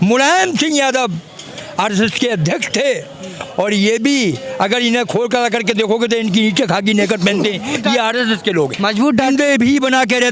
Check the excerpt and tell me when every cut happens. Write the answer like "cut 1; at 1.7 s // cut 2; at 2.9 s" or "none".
cut 1; at 9.3 s

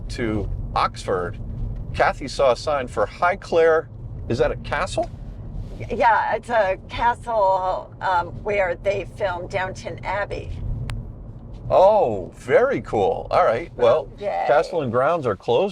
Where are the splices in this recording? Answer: cut 1; at 14.2 s

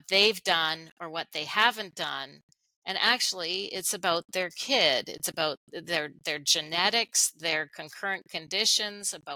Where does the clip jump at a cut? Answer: none

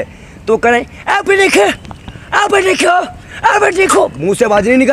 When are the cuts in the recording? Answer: none

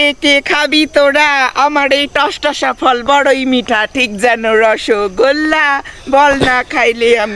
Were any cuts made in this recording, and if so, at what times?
none

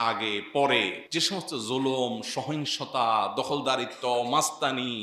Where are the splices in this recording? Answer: cut 1; at 1.0 s

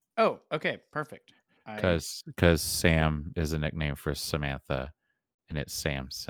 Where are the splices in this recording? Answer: cut 1; at 1.8 s

